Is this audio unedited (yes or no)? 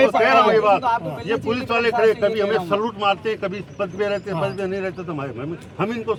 yes